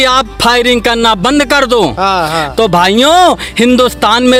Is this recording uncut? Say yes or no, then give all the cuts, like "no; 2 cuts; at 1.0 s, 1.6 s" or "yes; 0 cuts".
yes; 0 cuts